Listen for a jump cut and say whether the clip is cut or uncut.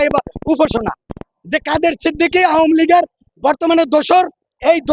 cut